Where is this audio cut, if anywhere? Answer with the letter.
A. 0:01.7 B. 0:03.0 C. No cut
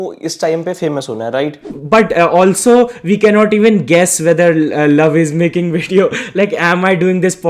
A